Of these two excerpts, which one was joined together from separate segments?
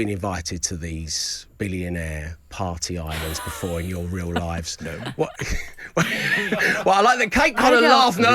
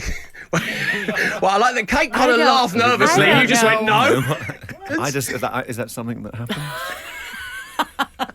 second; 1 cut; at 4.9 s

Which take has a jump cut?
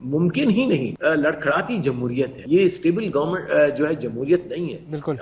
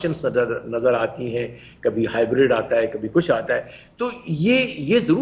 first; 2 cuts; at 0.9 s, 2.4 s

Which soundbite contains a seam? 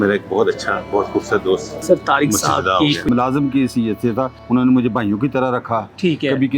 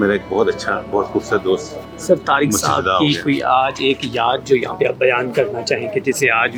first; 3 cuts; at 1.7 s, 3.1 s, 4.4 s

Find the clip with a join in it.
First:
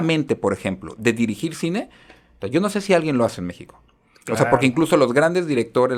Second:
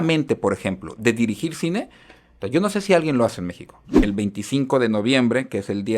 second; 1 cut; at 3.9 s

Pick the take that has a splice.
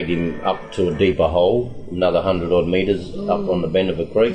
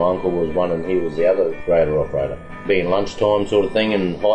second; 2 cuts; at 1.6 s, 2.6 s

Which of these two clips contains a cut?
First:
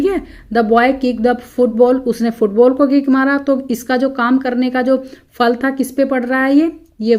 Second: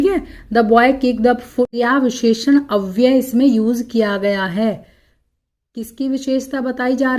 second; 1 cut; at 1.7 s

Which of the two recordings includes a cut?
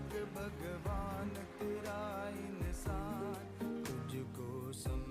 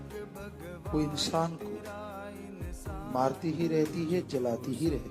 second; 3 cuts; at 0.9 s, 1.6 s, 3.1 s

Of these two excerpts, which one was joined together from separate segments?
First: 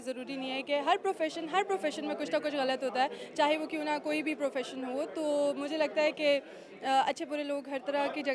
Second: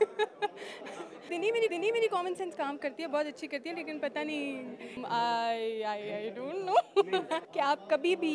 second; 3 cuts; at 1.6 s, 5.0 s, 7.4 s

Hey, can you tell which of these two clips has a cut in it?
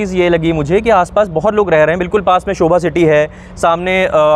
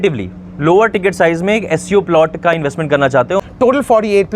second; 1 cut; at 3.4 s

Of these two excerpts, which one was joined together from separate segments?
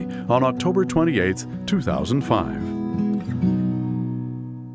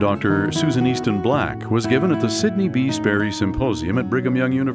first; 1 cut; at 2.5 s

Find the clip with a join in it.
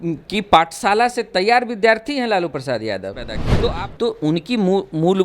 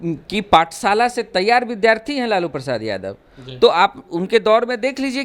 first; 1 cut; at 3.5 s

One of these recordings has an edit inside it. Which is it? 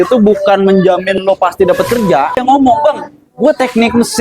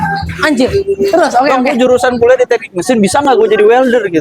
first; 1 cut; at 2.4 s

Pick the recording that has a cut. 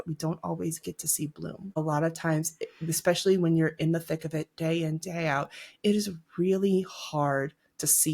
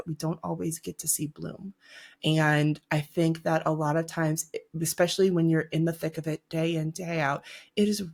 first; 1 cut; at 1.8 s

